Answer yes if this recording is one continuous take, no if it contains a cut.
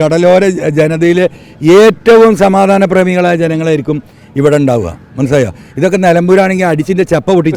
yes